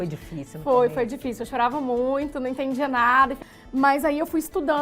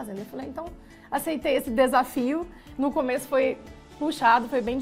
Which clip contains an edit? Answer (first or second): first